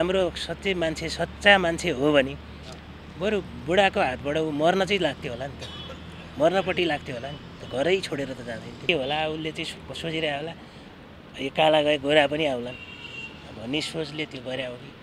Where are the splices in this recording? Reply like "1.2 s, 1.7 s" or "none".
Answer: 8.9 s

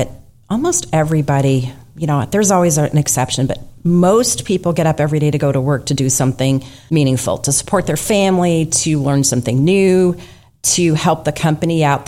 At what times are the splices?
6.7 s

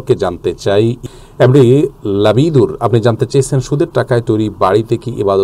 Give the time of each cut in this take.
1.0 s

